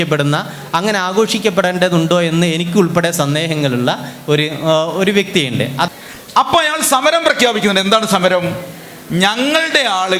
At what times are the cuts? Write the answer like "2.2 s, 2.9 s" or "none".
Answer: 5.9 s